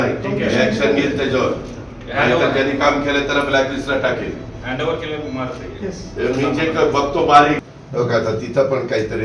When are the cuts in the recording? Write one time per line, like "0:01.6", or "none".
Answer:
0:07.6